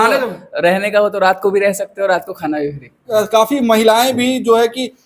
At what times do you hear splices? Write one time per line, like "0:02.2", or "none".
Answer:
0:03.1

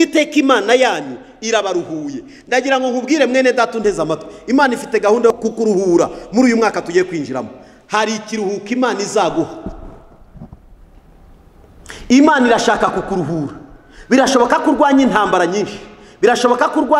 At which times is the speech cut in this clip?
0:05.4

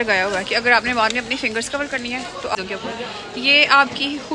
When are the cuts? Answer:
0:02.6

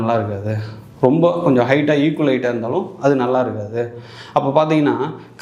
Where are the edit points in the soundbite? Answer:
none

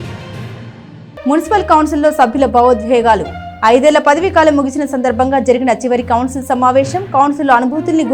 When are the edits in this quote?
0:01.0

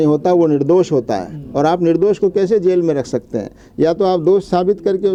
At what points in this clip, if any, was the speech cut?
none

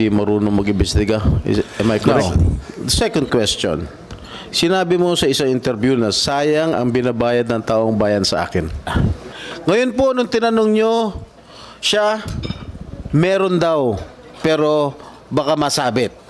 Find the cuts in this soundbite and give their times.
0:02.0
0:08.9

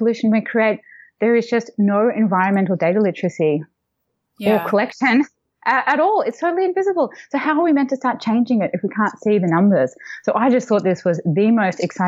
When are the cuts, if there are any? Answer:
none

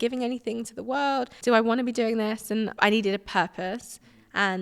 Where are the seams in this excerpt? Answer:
0:01.3
0:02.7

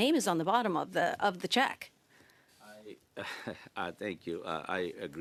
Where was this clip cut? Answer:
none

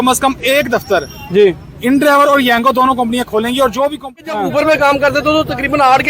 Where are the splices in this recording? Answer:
0:04.2

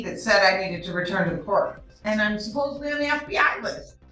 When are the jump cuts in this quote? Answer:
0:01.9

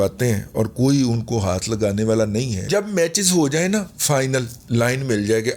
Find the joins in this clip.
0:02.7
0:04.6

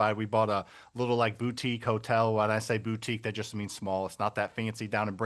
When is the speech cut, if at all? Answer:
none

